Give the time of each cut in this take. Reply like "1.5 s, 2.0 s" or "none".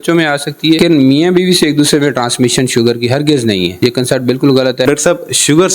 0.8 s, 3.7 s, 4.8 s

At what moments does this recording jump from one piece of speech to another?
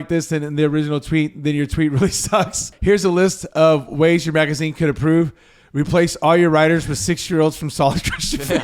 2.7 s

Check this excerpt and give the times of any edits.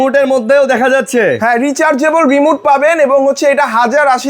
none

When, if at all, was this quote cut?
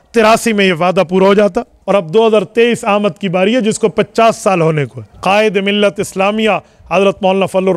1.7 s, 5.0 s

